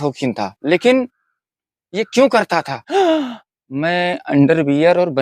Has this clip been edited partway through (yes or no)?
yes